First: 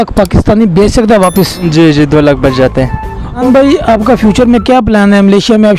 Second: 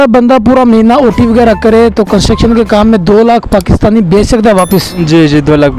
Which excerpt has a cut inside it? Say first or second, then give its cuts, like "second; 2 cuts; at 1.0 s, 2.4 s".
first; 1 cut; at 3.4 s